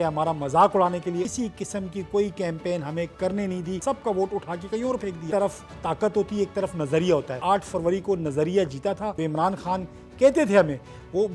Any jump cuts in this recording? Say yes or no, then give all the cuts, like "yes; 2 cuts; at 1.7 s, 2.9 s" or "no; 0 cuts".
yes; 5 cuts; at 1.3 s, 3.8 s, 5.2 s, 7.4 s, 9.1 s